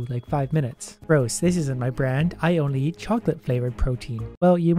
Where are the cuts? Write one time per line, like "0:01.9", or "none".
0:01.0